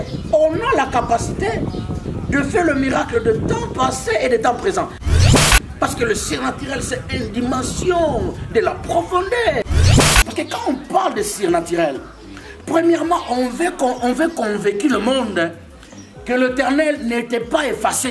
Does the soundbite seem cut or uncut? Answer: cut